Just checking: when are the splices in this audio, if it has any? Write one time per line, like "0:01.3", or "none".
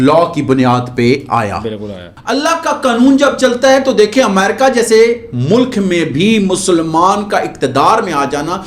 0:02.2